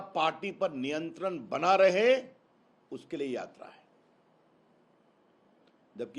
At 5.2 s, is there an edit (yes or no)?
yes